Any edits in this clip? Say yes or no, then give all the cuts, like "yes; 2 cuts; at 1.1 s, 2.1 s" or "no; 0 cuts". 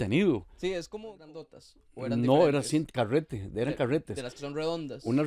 yes; 1 cut; at 0.9 s